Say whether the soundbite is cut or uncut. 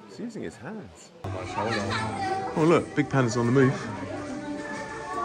cut